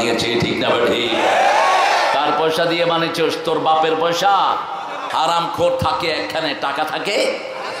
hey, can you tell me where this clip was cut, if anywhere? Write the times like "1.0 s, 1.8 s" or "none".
5.1 s